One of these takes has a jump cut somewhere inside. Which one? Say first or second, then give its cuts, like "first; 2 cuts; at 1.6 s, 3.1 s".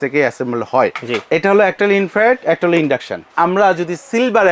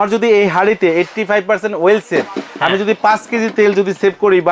first; 1 cut; at 3.3 s